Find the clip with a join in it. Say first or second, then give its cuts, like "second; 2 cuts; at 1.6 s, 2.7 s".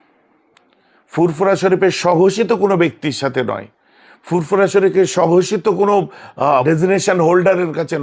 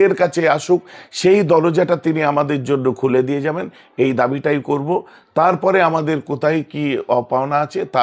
first; 1 cut; at 6.6 s